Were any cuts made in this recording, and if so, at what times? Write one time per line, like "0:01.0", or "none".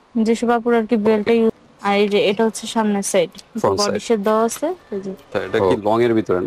0:01.7
0:05.5